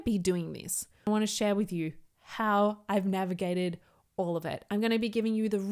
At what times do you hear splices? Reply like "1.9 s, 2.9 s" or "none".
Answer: 1.1 s